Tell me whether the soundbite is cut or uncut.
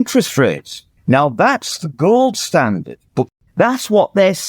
cut